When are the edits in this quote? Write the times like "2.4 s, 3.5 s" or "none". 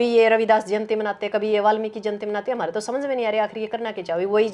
none